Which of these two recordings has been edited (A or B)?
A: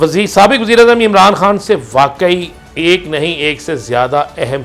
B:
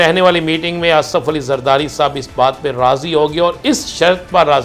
A